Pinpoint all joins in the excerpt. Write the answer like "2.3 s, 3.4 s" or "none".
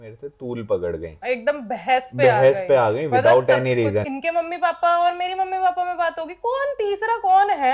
1.2 s, 4.1 s